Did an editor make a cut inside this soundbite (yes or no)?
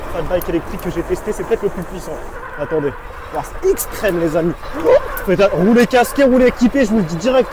no